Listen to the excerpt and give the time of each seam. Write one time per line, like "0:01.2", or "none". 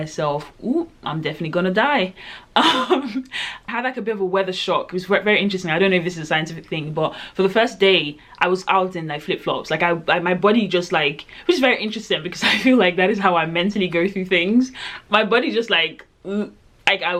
none